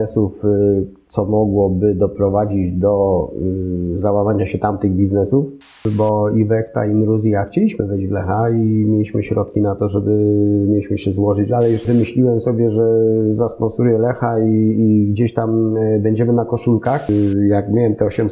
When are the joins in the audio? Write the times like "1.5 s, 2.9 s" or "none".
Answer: 5.8 s, 11.8 s, 17.1 s